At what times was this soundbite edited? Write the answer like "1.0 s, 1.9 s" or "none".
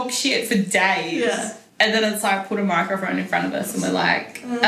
1.6 s